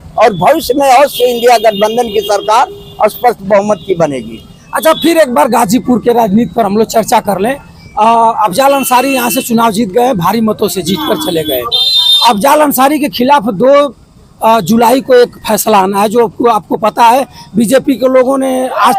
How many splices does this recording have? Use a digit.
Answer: 0